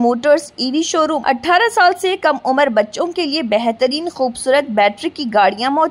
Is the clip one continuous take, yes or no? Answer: no